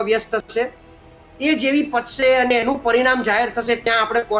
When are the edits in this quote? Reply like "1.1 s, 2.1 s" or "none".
none